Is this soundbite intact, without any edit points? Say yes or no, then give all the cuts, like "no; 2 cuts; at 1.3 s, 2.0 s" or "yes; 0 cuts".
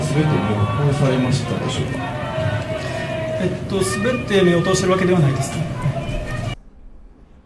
no; 1 cut; at 6.5 s